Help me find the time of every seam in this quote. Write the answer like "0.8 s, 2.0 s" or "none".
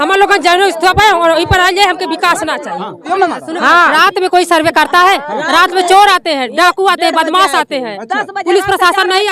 3.0 s